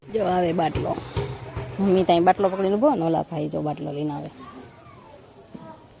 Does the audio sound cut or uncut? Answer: uncut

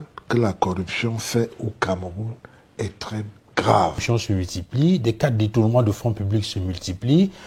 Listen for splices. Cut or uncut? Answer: cut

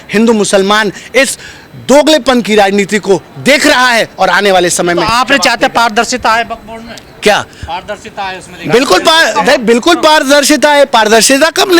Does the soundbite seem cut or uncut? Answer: uncut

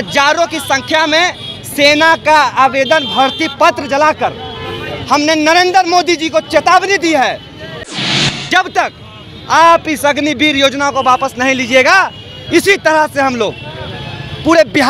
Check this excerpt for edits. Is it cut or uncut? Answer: cut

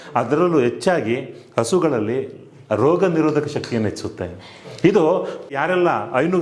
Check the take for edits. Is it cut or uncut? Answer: uncut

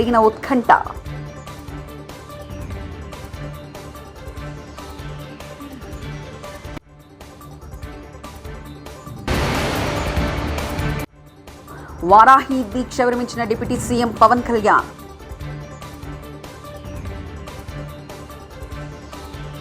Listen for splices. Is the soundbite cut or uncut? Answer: uncut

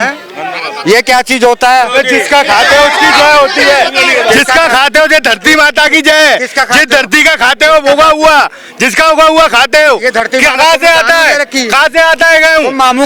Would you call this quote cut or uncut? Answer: uncut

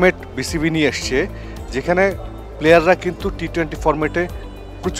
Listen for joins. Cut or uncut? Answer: uncut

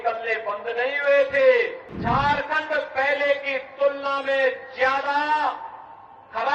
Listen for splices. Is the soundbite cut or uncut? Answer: cut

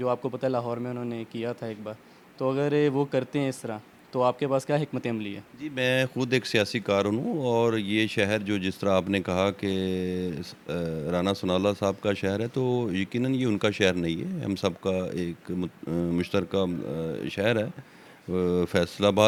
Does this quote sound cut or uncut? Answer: uncut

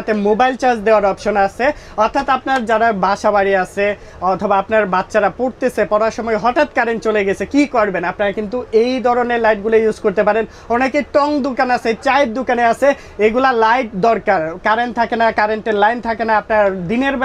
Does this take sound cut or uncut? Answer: uncut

